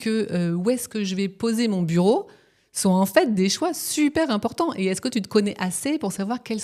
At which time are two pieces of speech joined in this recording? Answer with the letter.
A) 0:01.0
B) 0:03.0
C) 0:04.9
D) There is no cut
D